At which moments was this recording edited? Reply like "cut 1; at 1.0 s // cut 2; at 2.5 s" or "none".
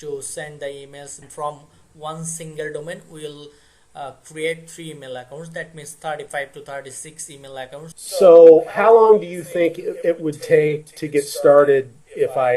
cut 1; at 1.3 s // cut 2; at 7.9 s

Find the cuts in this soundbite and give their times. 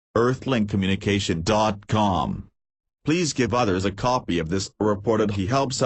none

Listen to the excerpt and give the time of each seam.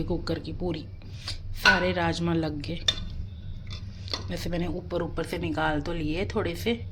none

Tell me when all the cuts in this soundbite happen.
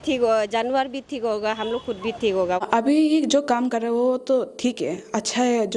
cut 1; at 2.6 s

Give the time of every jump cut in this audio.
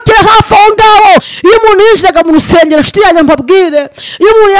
cut 1; at 1.3 s

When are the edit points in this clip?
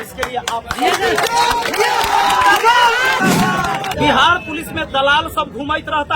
cut 1; at 3.9 s

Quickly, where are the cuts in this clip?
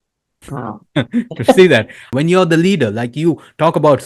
cut 1; at 2.1 s

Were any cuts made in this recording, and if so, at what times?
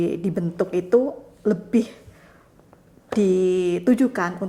none

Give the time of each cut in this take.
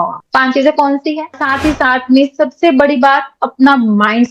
cut 1; at 1.3 s

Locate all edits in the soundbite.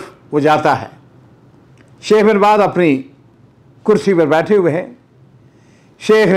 none

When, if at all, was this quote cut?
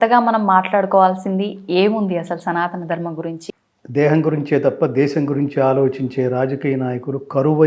none

